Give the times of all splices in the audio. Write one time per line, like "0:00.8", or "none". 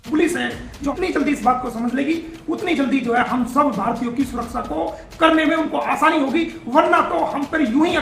0:00.9